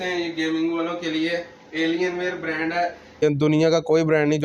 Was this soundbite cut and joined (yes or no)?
yes